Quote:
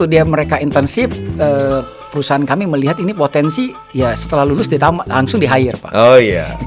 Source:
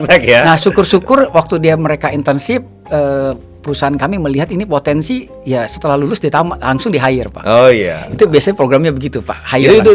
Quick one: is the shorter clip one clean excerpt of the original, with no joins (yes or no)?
yes